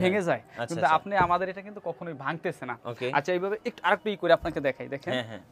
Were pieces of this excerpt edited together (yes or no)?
no